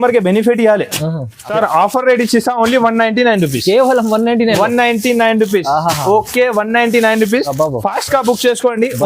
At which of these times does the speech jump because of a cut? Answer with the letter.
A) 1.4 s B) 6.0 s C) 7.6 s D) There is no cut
A